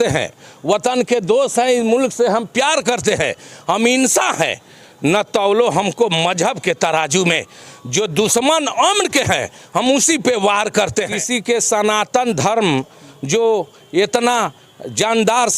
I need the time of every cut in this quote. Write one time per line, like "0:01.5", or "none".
0:11.2